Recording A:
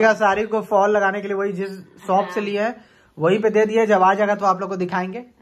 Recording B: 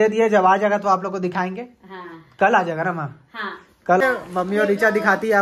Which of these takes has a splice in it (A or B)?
B